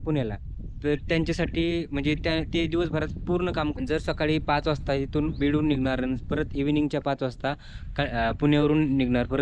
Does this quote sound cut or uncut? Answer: cut